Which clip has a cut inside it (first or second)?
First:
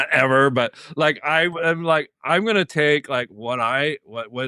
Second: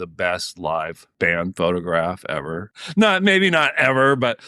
second